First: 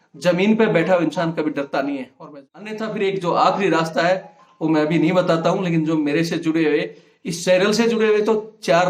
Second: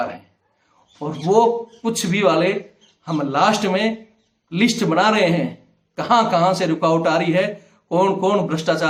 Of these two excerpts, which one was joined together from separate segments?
first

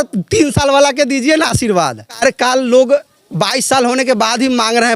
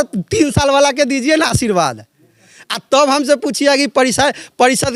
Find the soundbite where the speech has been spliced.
first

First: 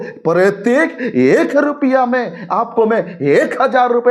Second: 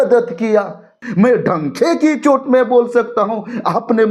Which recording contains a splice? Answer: second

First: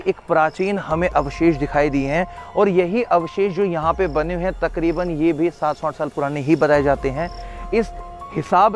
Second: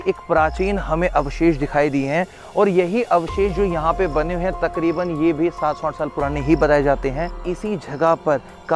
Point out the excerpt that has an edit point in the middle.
second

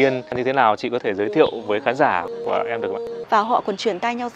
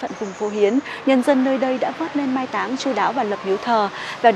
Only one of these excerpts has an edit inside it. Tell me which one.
first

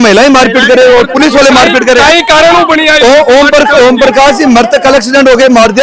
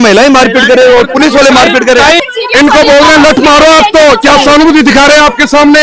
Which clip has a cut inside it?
second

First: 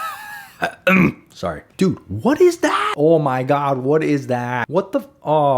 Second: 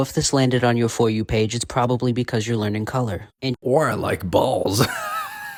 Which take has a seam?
first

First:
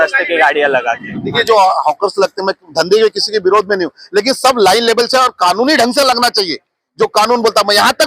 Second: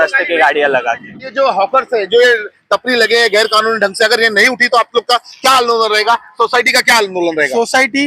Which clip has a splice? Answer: second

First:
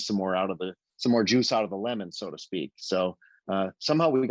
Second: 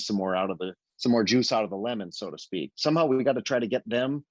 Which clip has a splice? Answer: second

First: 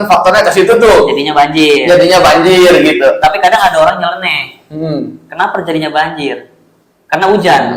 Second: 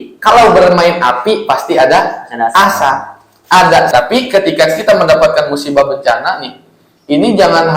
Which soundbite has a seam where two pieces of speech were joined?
second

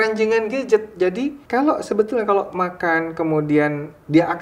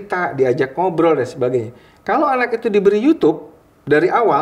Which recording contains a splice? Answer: first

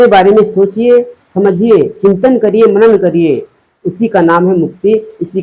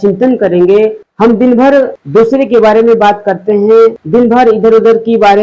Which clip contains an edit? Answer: second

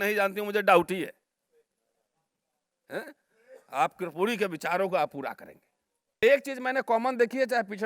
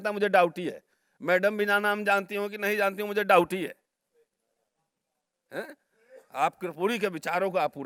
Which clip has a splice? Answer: first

